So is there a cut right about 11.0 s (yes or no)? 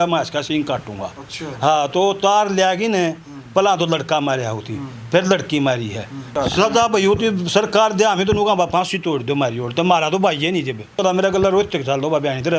yes